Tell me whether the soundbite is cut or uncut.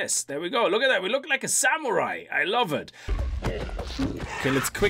cut